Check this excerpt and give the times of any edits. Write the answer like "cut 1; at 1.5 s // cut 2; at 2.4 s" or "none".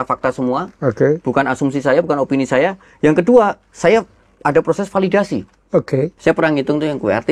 cut 1; at 6.1 s